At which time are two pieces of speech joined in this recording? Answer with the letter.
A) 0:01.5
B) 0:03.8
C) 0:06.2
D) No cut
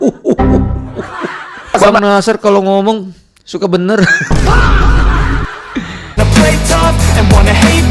C